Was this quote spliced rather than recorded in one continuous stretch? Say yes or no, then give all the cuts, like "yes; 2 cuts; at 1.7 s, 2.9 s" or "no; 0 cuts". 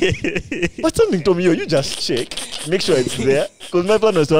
no; 0 cuts